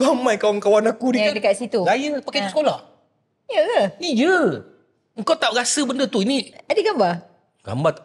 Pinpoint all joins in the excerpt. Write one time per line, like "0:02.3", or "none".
0:06.5